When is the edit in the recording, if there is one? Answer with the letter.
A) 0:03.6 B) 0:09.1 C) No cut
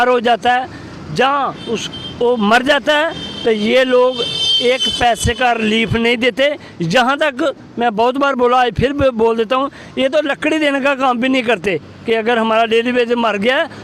C